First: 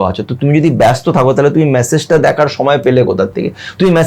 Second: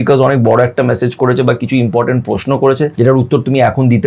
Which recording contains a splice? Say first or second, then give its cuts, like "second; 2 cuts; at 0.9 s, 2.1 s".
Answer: second; 1 cut; at 2.9 s